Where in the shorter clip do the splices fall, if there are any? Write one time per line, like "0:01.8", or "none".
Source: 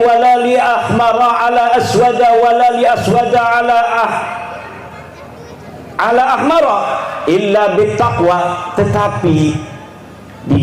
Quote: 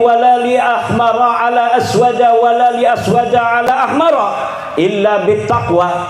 0:03.7